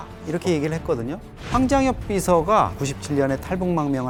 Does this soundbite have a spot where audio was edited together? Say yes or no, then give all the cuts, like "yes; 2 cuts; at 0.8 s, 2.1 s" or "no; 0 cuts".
no; 0 cuts